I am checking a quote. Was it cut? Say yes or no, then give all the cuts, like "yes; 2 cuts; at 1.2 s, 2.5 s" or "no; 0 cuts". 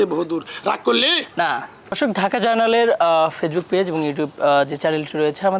no; 0 cuts